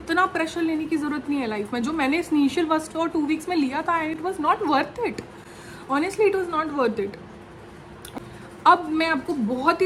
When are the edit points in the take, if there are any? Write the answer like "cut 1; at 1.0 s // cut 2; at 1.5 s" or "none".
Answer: none